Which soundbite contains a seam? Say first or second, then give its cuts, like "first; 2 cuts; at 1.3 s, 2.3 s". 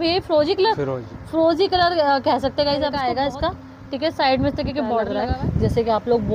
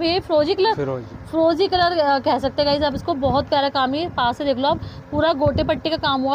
first; 2 cuts; at 3.0 s, 5.1 s